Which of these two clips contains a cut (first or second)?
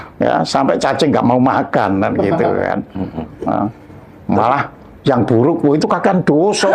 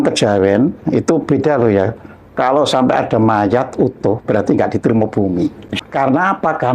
second